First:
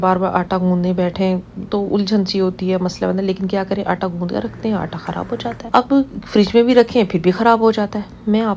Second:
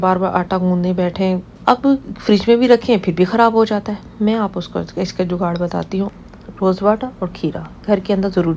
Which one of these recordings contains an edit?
second; 2 cuts; at 1.5 s, 6.1 s

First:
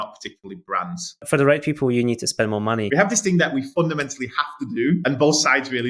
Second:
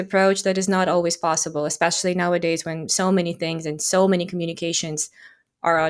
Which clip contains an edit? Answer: first; 2 cuts; at 1.2 s, 2.9 s

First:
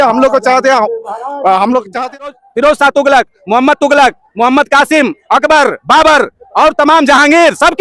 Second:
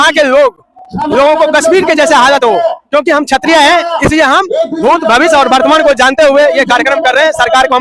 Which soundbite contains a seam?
first; 1 cut; at 2.3 s

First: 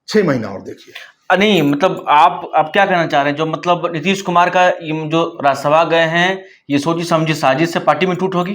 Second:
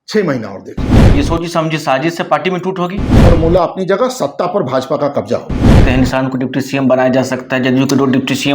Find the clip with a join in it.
second; 3 cuts; at 0.9 s, 3.3 s, 5.8 s

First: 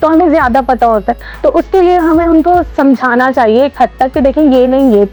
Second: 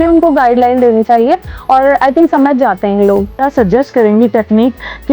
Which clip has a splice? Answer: second; 1 cut; at 3.3 s

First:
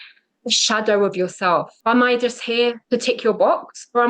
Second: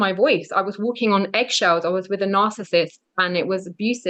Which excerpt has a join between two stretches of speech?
first; 2 cuts; at 1.7 s, 2.8 s

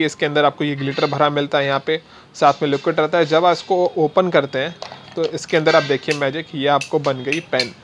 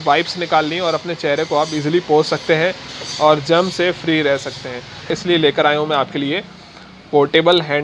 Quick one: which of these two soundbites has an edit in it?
second; 1 cut; at 5.1 s

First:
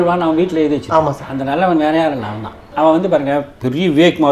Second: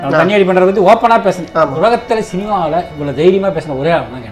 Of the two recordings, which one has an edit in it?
first; 1 cut; at 2.6 s

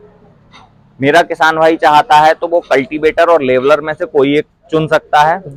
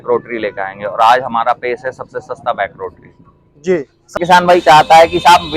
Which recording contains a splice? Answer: second; 1 cut; at 4.2 s

